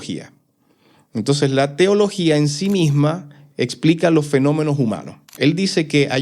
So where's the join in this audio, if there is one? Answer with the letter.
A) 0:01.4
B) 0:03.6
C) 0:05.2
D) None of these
C